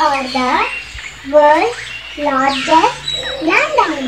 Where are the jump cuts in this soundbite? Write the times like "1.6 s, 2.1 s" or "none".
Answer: none